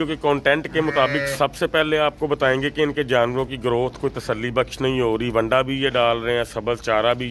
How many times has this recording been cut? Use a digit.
0